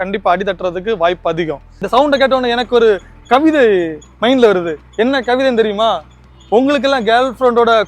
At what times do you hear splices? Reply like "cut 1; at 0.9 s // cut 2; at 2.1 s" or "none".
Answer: cut 1; at 1.7 s